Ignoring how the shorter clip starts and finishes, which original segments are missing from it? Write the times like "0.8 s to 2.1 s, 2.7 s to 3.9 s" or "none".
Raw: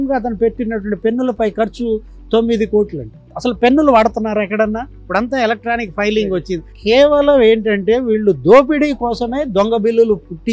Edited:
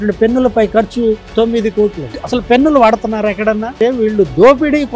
2.1 s to 2.2 s, 3.1 s to 3.2 s, 4.9 s to 7.8 s